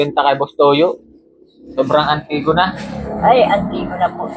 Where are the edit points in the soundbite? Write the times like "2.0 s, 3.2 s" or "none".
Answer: none